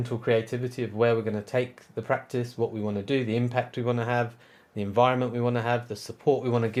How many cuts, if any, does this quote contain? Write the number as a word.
zero